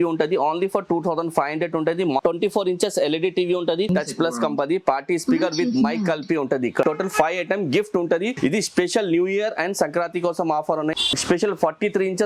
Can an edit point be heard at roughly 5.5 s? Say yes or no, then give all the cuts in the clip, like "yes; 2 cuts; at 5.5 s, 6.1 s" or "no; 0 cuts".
no; 5 cuts; at 2.2 s, 3.9 s, 6.8 s, 8.3 s, 11.1 s